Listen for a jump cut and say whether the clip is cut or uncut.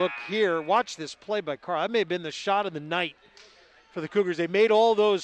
uncut